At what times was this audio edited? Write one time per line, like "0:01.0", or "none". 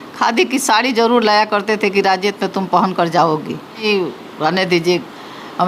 0:03.8